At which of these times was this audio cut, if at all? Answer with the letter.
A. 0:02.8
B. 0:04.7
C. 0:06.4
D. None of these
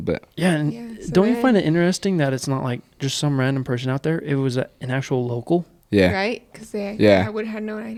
D